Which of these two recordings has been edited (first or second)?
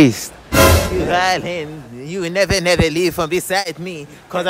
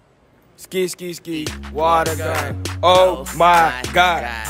first